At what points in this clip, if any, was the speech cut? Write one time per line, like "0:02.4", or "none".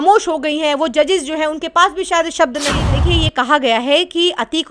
0:02.8

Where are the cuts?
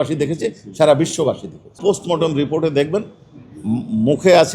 0:01.8

